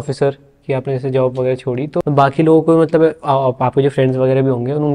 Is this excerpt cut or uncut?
cut